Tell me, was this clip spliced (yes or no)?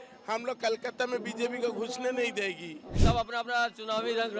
yes